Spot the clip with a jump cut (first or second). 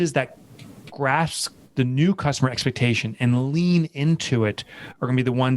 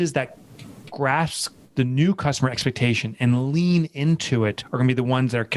second